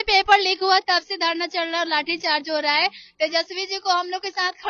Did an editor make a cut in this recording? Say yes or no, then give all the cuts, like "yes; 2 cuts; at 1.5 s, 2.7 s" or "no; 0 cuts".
no; 0 cuts